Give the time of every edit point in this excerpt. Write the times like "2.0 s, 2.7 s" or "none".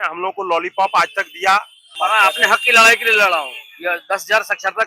1.8 s